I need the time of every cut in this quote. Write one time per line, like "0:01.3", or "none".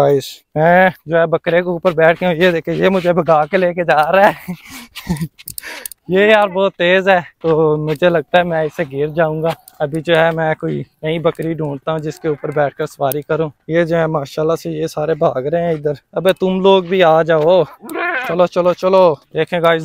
none